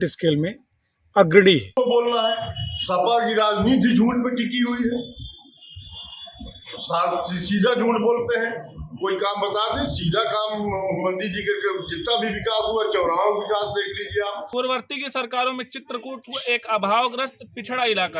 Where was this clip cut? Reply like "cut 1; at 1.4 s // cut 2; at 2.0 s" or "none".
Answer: cut 1; at 1.7 s // cut 2; at 14.4 s

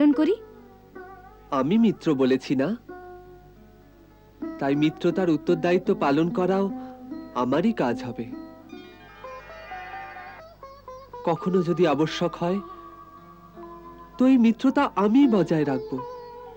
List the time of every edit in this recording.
none

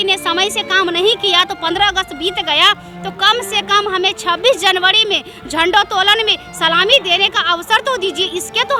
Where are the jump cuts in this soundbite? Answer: none

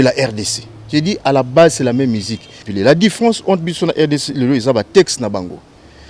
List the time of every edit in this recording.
cut 1; at 2.7 s

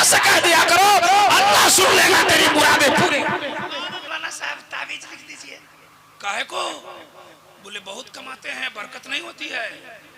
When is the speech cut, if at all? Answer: cut 1; at 4.1 s

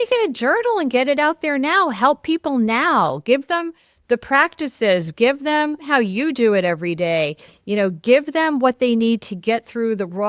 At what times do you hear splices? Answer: cut 1; at 5.8 s

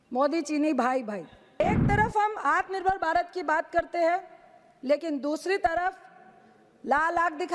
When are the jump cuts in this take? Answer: cut 1; at 1.6 s

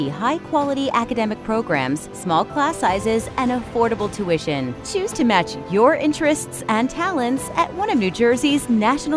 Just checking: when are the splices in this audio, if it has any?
none

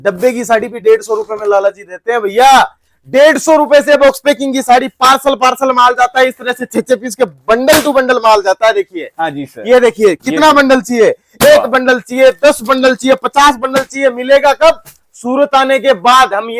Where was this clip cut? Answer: none

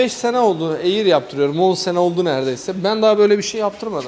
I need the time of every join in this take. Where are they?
none

